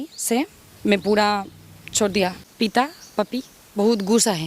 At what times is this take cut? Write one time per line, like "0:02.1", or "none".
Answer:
0:02.5

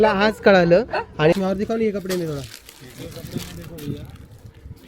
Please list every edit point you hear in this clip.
0:01.3

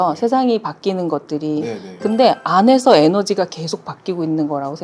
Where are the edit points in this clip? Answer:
none

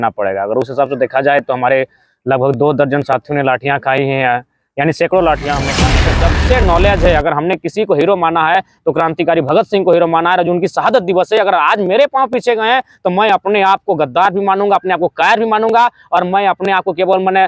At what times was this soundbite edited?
0:06.0

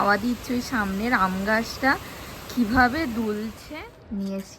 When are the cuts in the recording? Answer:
0:03.6

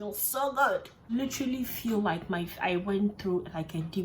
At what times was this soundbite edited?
0:01.1

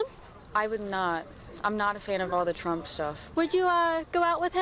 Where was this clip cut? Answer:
0:03.2

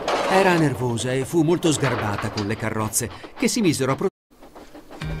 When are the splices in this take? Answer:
0:04.1

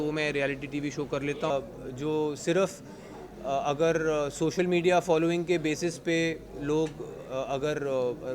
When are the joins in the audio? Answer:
0:01.5

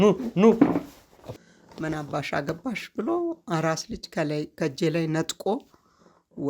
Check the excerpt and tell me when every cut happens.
0:01.2

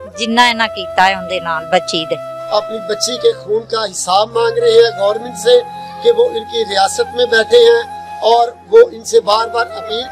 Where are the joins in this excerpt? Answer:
0:02.3

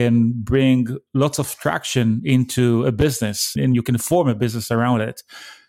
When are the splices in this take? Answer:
0:03.5

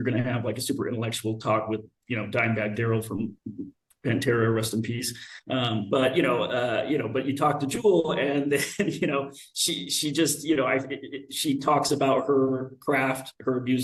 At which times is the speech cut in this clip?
none

